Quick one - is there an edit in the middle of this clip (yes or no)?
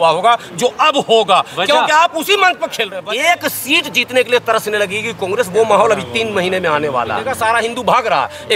yes